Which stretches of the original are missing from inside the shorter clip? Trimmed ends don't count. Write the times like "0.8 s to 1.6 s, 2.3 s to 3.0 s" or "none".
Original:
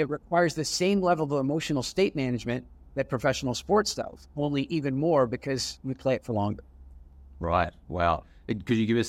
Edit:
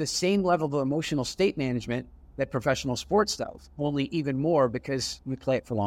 none

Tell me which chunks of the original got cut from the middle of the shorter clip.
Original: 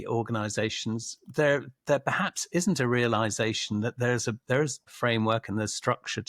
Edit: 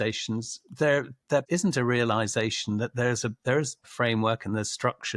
2.0 s to 2.5 s

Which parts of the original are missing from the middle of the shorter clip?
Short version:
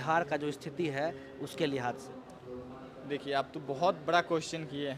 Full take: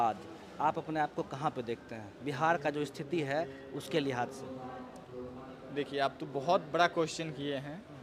4.5 s to 4.9 s

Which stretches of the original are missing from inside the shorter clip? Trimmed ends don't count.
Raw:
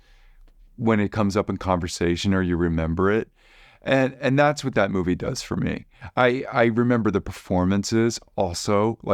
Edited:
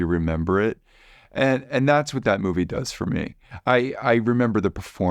none

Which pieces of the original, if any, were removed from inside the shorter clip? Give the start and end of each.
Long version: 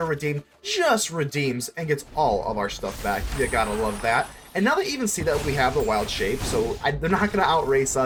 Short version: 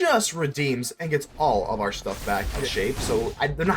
3.4 s to 6.1 s

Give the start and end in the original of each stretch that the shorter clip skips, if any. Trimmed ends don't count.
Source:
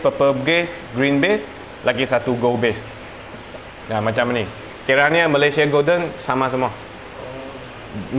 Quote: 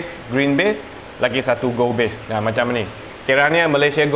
2.8 s to 3.8 s

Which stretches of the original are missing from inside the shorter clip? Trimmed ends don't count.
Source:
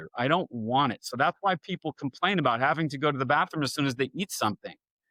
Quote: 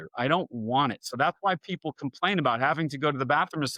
none

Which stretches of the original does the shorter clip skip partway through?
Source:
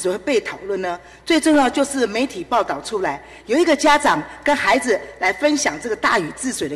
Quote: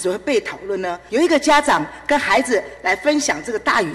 1.0 s to 3.4 s

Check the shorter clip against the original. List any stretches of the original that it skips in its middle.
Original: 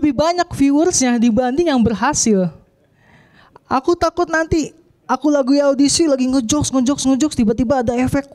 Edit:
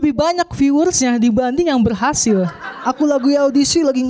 2.7 s to 4.9 s

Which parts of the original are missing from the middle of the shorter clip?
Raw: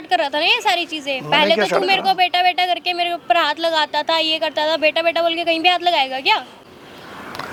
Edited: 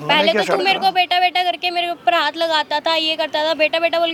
none

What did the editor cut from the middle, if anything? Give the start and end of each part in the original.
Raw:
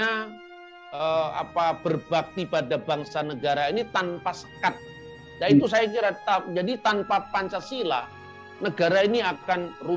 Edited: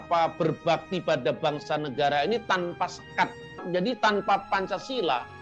5.1 s to 6.5 s

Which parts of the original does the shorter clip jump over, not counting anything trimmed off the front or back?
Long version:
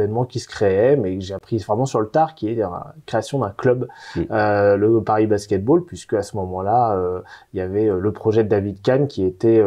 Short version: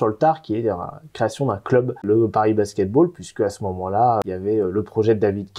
4.0 s to 4.8 s, 7.0 s to 7.5 s

